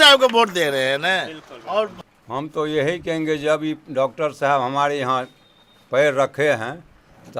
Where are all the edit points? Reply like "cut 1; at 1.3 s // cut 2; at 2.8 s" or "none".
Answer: cut 1; at 2.1 s